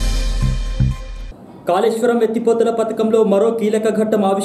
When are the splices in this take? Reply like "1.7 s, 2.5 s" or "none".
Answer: 1.1 s